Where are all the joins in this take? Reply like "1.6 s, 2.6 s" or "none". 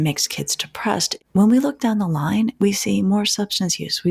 1.1 s